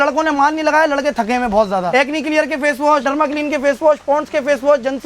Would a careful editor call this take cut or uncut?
cut